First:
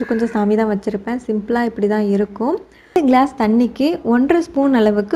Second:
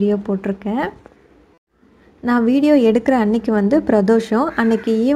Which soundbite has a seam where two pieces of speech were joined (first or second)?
first